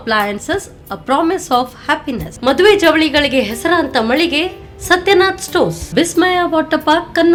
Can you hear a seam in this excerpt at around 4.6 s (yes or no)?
no